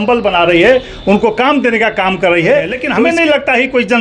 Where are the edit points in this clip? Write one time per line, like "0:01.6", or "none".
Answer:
0:02.8